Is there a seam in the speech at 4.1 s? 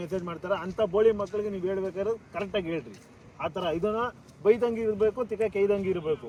no; 0 cuts

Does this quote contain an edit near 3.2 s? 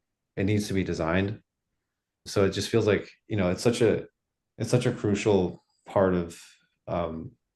no; 0 cuts

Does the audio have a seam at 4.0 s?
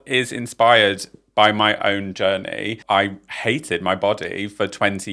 no; 1 cut; at 2.8 s

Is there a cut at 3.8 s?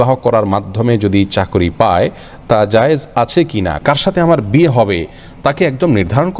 yes; 1 cut; at 3.8 s

